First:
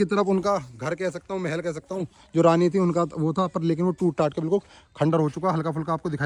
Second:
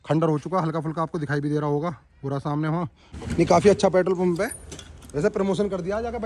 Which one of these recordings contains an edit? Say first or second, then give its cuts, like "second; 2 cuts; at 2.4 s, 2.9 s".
second; 1 cut; at 3.1 s